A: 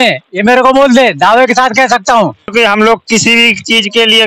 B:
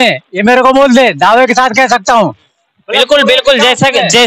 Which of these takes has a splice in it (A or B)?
A